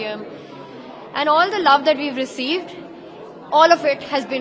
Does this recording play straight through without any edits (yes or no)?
yes